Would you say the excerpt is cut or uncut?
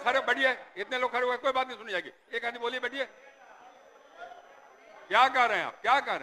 uncut